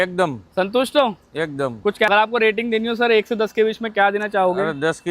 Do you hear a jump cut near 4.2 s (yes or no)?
no